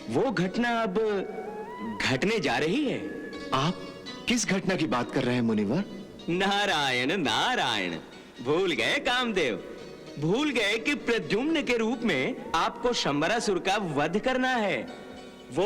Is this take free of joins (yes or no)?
yes